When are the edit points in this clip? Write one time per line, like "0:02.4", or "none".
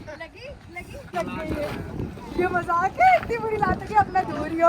0:01.1